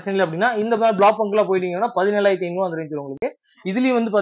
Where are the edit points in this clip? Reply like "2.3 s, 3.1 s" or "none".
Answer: none